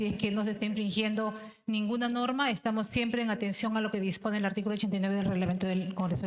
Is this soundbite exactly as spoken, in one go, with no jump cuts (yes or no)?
yes